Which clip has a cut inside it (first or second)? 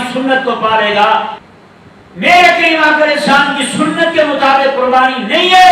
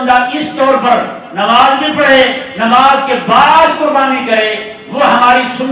first